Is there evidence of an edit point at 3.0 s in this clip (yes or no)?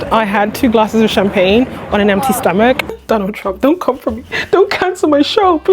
yes